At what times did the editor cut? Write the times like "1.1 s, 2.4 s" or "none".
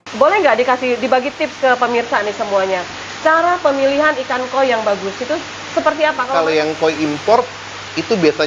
6.2 s